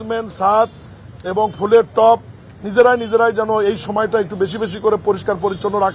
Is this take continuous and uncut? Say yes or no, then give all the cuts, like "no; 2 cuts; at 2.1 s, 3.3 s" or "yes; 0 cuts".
yes; 0 cuts